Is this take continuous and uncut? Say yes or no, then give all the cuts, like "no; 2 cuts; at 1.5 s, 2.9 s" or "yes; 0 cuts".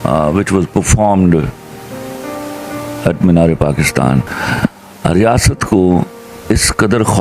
no; 1 cut; at 4.4 s